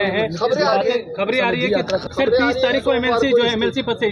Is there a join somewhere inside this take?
yes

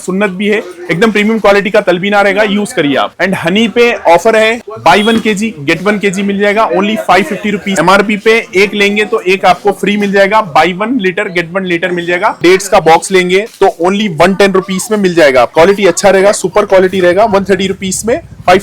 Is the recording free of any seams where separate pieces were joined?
no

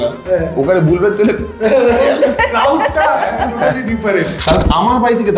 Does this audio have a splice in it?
yes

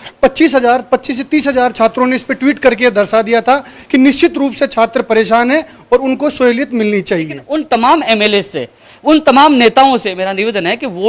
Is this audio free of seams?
no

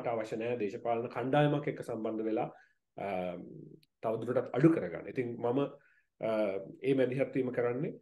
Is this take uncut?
yes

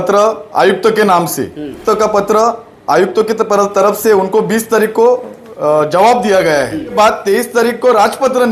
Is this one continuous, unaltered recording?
no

